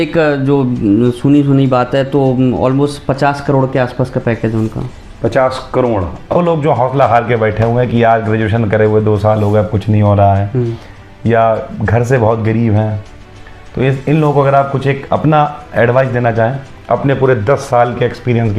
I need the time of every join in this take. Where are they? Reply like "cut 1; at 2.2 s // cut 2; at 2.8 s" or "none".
cut 1; at 6.4 s

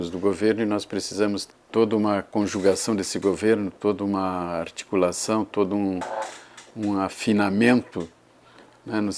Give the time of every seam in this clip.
cut 1; at 1.4 s

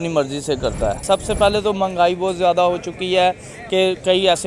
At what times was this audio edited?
cut 1; at 1.0 s

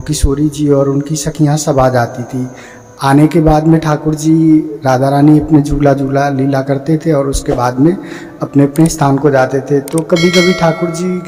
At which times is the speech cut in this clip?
none

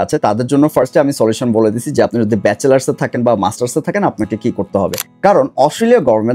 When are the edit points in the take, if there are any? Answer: cut 1; at 5.0 s

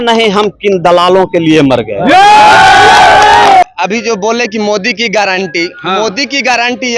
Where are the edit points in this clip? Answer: cut 1; at 3.6 s

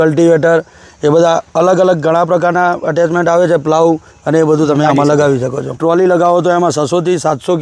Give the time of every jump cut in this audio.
cut 1; at 5.8 s

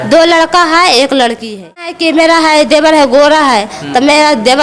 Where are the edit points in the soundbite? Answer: cut 1; at 1.9 s

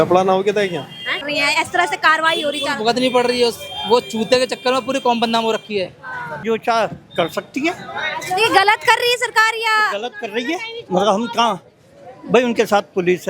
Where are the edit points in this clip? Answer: cut 1; at 1.3 s // cut 2; at 6.4 s

